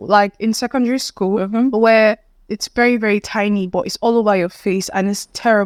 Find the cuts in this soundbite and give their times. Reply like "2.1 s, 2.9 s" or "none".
none